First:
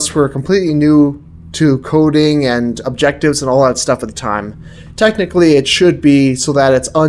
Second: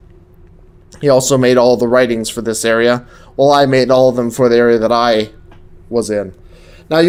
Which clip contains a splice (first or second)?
first